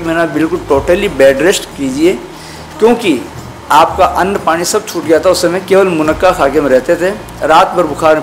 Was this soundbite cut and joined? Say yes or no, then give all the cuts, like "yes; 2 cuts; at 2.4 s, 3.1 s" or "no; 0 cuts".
no; 0 cuts